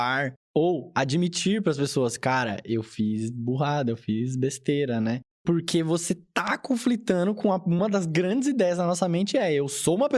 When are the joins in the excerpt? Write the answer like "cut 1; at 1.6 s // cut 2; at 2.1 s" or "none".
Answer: cut 1; at 5.4 s